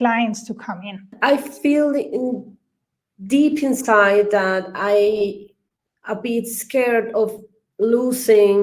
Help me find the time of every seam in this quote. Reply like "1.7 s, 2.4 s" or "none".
1.1 s